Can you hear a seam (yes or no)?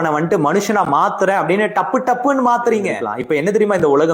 yes